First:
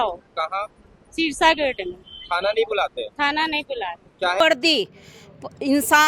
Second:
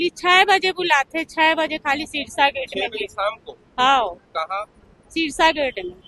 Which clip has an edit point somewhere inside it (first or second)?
first